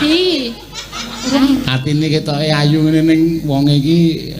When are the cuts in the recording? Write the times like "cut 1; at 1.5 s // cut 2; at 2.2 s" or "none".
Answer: cut 1; at 1.4 s